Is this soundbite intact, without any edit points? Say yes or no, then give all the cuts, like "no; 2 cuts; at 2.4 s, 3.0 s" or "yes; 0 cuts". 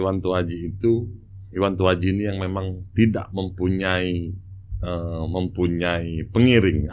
yes; 0 cuts